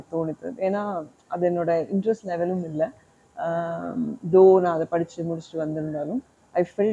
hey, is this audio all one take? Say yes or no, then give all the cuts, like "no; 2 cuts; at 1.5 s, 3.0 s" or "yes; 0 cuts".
yes; 0 cuts